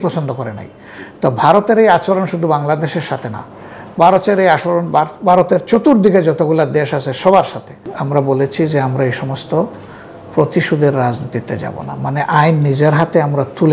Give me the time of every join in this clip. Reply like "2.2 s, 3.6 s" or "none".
7.9 s